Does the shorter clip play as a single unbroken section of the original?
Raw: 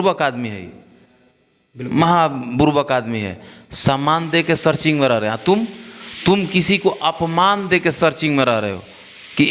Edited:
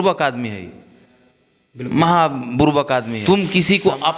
no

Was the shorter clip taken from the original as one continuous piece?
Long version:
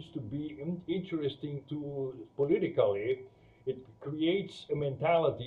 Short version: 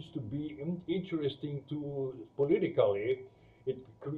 yes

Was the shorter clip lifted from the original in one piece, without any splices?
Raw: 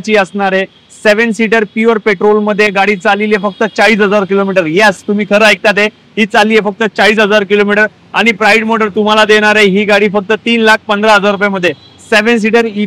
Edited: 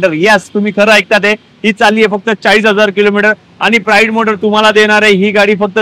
yes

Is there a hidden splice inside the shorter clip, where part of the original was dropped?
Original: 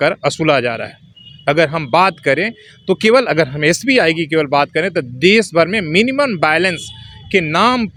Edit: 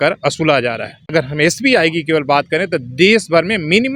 yes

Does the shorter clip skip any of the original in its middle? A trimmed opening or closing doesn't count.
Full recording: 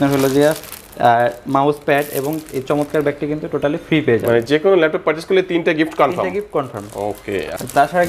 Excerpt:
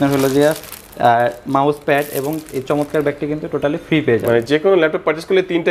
no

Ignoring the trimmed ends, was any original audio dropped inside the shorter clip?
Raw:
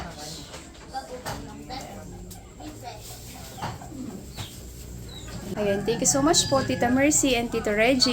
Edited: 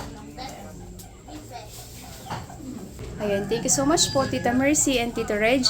yes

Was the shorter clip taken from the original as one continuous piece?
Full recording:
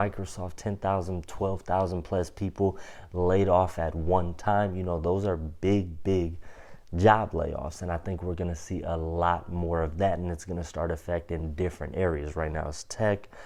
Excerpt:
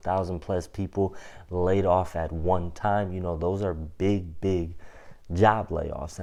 yes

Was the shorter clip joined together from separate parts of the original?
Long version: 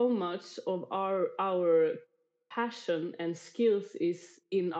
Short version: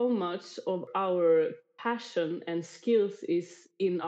yes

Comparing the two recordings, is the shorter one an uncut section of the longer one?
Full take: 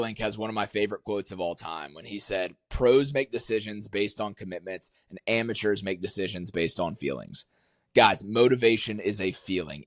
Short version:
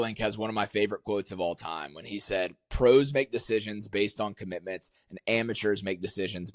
yes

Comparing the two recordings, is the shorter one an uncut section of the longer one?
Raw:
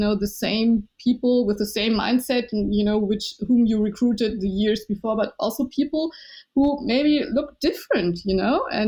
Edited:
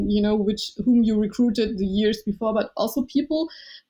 yes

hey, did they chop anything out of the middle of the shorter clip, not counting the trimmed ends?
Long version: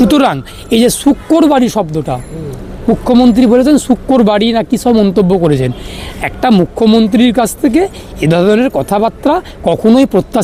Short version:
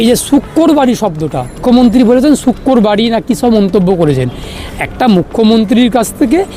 yes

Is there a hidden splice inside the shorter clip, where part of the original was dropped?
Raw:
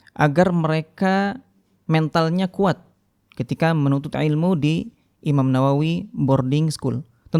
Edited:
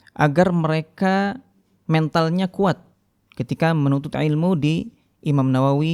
no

